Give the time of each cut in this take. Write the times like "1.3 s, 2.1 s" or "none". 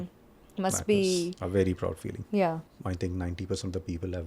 2.7 s

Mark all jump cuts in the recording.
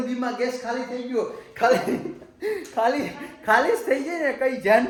none

